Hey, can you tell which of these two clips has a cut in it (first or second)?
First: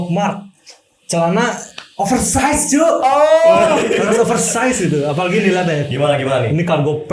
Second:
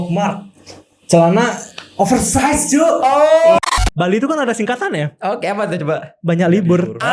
second